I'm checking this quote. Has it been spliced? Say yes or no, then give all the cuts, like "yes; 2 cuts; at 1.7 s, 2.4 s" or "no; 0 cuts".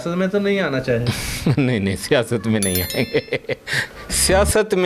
no; 0 cuts